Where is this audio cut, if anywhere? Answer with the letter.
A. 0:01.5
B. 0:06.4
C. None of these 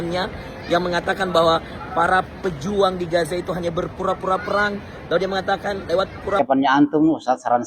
B